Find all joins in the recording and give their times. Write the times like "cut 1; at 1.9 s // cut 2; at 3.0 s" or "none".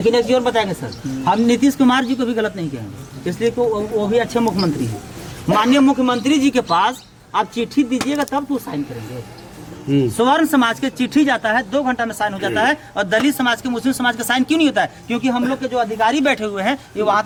none